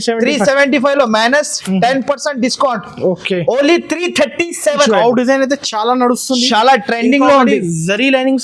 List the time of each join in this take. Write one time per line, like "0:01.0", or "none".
0:04.9